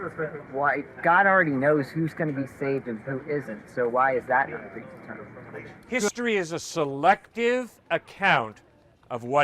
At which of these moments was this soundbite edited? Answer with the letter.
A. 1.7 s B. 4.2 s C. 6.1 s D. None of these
C